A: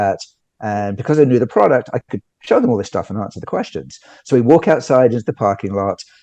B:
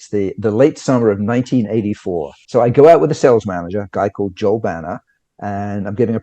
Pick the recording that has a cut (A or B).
B